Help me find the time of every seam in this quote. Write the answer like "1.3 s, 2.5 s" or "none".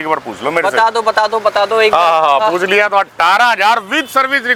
none